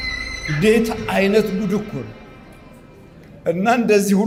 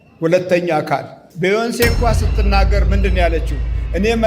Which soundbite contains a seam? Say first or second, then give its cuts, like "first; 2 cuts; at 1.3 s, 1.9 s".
second; 1 cut; at 1.2 s